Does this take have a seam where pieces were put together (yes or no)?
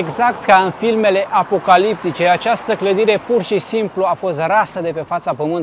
no